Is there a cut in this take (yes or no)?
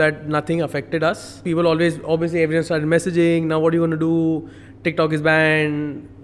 yes